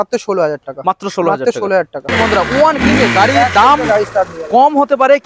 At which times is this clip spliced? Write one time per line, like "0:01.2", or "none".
0:02.1